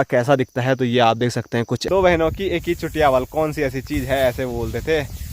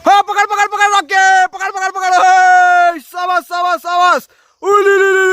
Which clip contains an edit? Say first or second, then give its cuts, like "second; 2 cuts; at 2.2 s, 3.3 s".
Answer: first; 1 cut; at 1.8 s